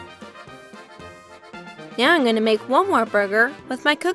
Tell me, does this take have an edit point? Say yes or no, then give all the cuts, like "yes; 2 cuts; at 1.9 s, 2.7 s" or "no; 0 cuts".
yes; 1 cut; at 2.0 s